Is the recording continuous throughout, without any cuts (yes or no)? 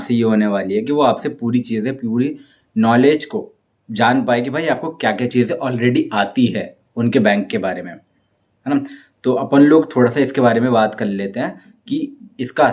yes